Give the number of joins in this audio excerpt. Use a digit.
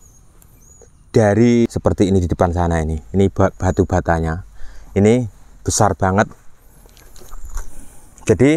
1